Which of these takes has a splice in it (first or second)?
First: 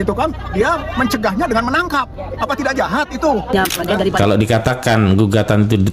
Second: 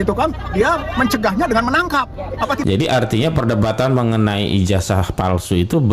second